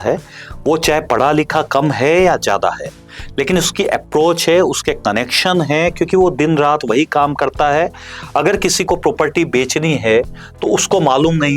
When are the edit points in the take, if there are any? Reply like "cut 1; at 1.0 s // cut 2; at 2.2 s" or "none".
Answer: none